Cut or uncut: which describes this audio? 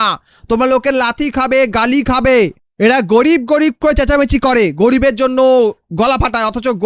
cut